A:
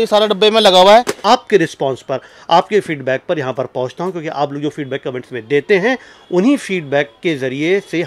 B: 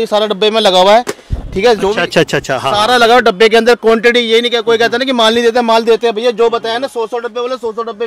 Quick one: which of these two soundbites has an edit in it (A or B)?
A